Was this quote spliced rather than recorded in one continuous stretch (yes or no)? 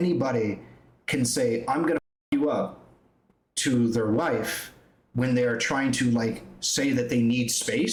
no